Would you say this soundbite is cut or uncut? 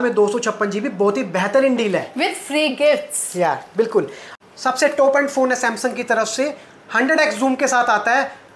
cut